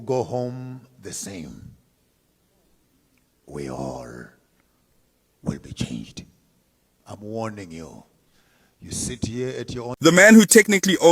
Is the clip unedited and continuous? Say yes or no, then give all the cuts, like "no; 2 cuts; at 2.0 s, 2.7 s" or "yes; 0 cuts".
no; 1 cut; at 10.0 s